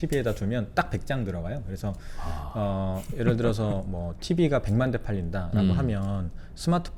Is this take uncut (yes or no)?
yes